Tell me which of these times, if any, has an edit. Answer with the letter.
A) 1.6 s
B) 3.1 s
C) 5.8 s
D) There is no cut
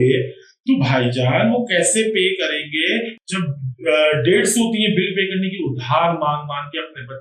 B